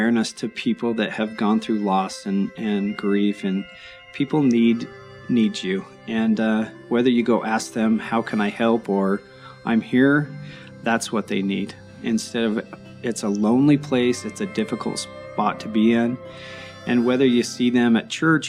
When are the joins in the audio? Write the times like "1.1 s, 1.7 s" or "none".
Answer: none

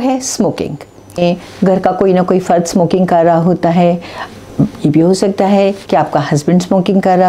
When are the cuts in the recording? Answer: 1.2 s

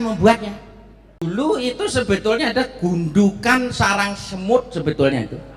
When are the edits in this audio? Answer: 1.2 s

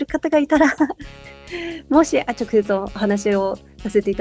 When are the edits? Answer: none

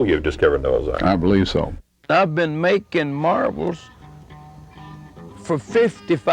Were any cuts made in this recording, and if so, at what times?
1.9 s

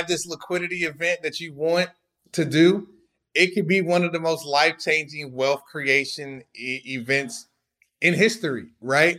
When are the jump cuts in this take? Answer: none

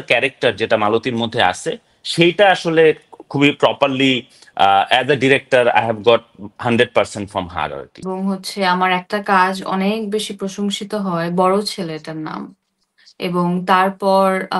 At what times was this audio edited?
8.0 s

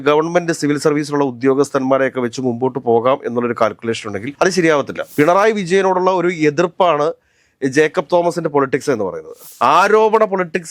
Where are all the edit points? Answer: 5.0 s, 9.5 s

